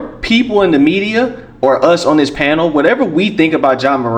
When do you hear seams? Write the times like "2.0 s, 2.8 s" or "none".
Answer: none

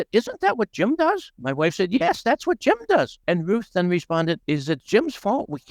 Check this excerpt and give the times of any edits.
1.3 s, 3.2 s, 4.4 s

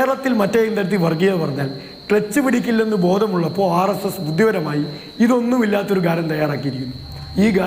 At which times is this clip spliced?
none

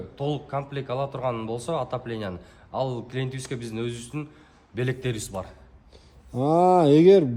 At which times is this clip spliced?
none

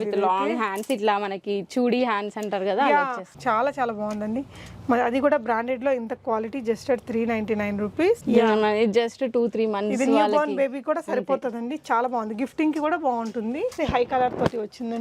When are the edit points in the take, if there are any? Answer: 3.2 s, 8.2 s, 13.8 s

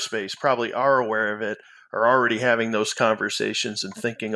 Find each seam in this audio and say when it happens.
none

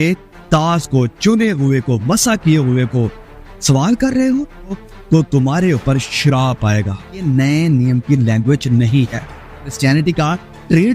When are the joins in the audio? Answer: 4.8 s, 7.2 s, 9.7 s

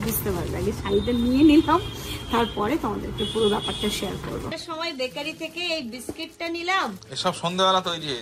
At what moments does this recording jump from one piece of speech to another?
4.5 s

